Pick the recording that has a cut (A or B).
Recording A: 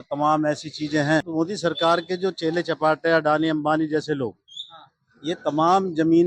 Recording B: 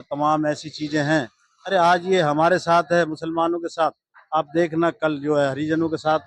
A